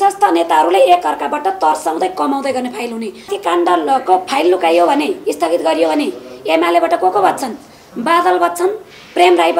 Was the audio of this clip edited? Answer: yes; 1 cut; at 3.3 s

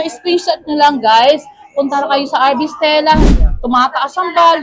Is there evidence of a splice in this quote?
yes; 1 cut; at 3.2 s

